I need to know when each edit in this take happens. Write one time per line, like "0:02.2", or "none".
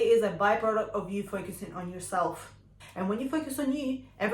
0:02.7